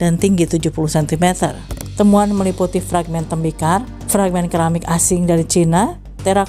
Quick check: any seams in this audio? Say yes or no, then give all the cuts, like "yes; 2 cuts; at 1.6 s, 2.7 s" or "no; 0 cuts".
yes; 1 cut; at 1.8 s